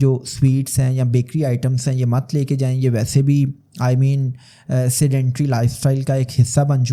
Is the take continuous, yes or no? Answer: yes